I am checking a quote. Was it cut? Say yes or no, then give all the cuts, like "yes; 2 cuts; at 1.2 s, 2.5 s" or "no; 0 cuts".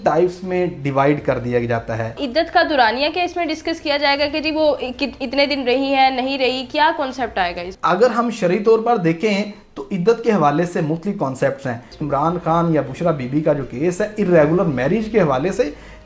yes; 3 cuts; at 2.2 s, 7.7 s, 12.0 s